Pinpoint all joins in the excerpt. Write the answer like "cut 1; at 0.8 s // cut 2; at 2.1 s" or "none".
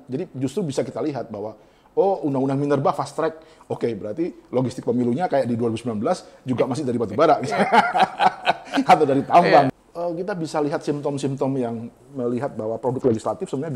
cut 1; at 9.7 s